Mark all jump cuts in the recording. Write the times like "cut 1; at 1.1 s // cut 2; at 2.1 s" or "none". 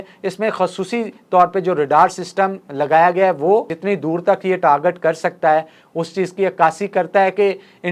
none